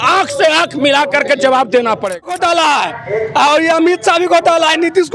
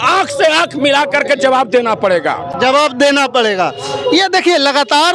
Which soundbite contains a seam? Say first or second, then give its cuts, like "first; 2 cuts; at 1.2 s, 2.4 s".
first; 1 cut; at 2.3 s